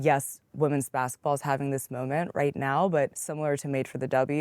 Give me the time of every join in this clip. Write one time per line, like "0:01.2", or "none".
0:03.2